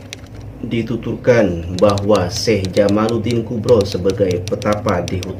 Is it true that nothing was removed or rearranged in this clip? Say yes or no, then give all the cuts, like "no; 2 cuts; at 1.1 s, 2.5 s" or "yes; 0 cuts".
yes; 0 cuts